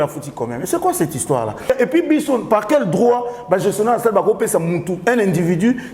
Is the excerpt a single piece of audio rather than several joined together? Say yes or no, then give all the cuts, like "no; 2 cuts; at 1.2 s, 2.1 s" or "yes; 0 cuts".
no; 1 cut; at 1.7 s